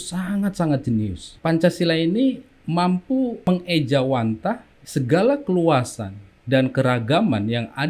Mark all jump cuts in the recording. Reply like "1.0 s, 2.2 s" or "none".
1.2 s, 2.5 s, 3.5 s, 4.7 s